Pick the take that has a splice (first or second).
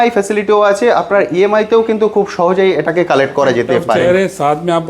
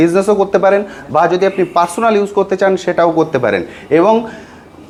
first